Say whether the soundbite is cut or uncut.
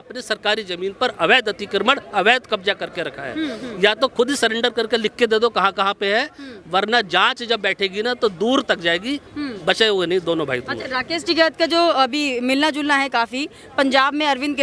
uncut